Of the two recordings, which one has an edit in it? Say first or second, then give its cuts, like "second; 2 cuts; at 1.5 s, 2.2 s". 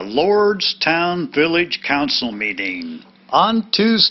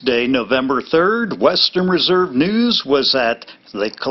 first; 1 cut; at 3.2 s